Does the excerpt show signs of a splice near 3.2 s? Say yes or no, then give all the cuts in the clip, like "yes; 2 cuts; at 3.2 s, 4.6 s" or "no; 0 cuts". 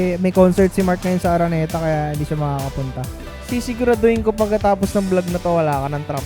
yes; 1 cut; at 3.2 s